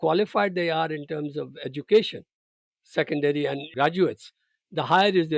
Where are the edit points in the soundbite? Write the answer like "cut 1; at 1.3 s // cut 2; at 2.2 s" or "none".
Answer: cut 1; at 3.7 s